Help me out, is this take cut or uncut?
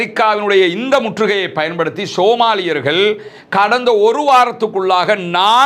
uncut